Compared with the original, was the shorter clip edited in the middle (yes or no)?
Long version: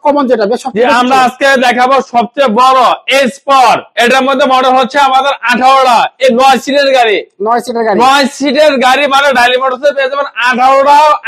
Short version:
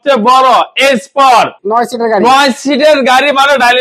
yes